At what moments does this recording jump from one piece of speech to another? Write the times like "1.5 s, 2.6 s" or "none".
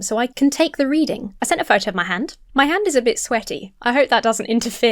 1.3 s, 2.4 s

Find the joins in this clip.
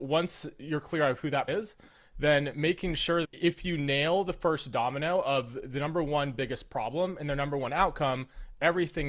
1.5 s, 3.2 s

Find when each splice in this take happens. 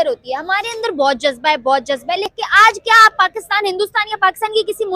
2.3 s

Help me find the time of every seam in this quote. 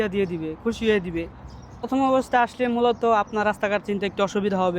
1.9 s

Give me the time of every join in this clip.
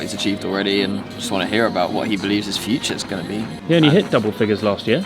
1.9 s, 3.5 s

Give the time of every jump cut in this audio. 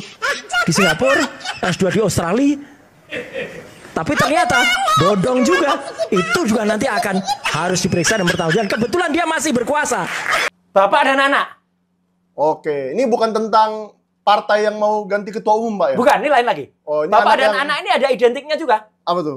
10.5 s

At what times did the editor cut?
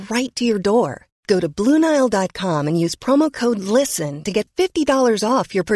none

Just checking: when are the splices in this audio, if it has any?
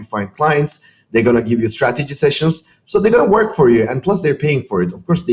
none

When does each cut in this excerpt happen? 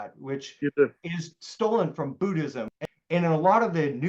2.7 s

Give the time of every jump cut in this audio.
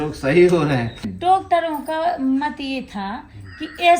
1.0 s

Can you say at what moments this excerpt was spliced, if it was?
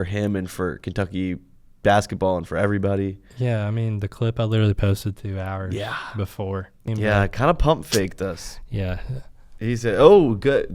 6.9 s

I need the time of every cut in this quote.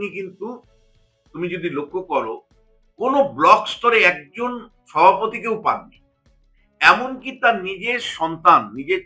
none

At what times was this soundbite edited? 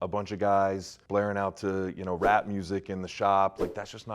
0.9 s

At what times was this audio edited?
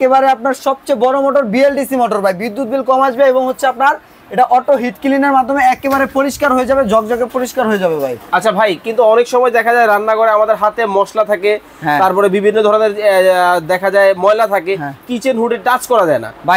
none

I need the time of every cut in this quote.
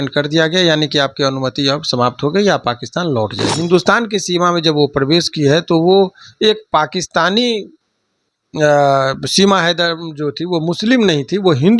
3.6 s

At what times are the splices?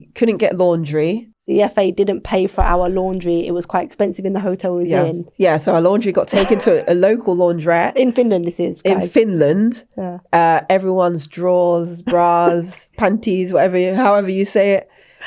1.4 s, 5.2 s

